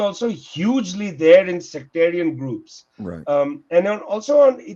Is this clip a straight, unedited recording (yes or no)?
yes